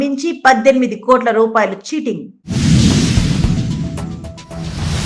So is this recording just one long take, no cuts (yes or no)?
yes